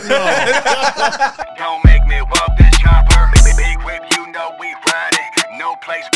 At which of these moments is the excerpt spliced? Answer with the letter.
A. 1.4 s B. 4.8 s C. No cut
A